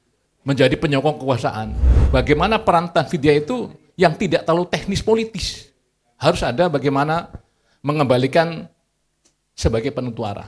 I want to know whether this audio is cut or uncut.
cut